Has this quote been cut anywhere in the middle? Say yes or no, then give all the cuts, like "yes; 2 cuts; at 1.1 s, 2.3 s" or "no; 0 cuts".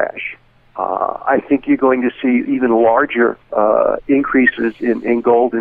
no; 0 cuts